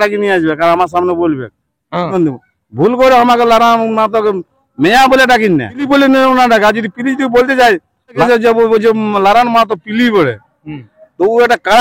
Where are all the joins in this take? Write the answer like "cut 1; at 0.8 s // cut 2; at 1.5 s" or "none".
cut 1; at 2.1 s // cut 2; at 5.9 s // cut 3; at 8.2 s